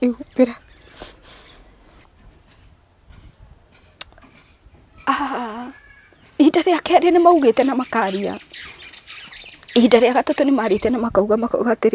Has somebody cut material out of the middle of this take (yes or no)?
yes